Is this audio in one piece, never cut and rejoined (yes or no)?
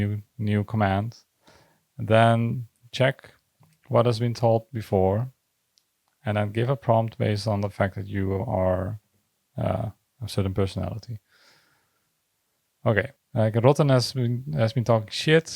no